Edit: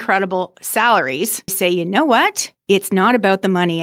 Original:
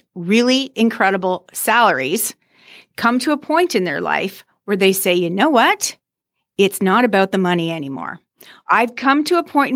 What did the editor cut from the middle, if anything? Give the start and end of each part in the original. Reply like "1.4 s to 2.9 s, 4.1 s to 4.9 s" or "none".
2.5 s to 5.0 s, 5.9 s to 6.4 s